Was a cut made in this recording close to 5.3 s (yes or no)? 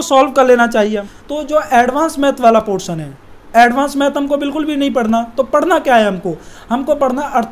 no